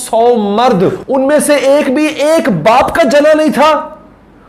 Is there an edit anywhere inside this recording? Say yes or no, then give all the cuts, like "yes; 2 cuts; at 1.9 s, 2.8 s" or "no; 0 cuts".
yes; 1 cut; at 1.0 s